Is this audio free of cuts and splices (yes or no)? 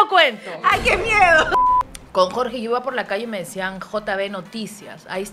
no